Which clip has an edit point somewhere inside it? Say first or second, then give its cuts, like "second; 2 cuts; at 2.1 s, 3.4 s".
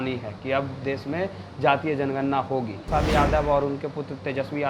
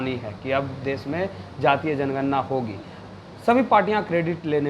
first; 1 cut; at 2.8 s